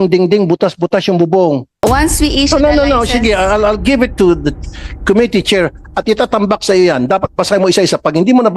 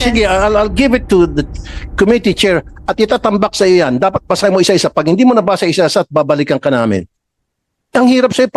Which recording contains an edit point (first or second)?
first